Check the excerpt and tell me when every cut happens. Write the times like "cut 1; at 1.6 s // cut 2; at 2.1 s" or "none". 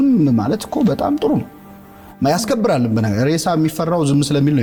none